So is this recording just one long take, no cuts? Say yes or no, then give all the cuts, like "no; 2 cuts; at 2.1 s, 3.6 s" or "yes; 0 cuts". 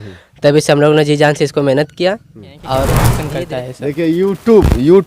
no; 1 cut; at 3.1 s